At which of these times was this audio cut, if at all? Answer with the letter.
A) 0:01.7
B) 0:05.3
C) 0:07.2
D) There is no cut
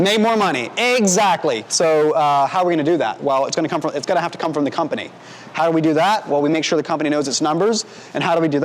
A